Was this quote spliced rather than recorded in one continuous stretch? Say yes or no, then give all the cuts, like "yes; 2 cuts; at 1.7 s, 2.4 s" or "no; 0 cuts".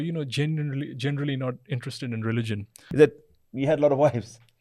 yes; 1 cut; at 2.8 s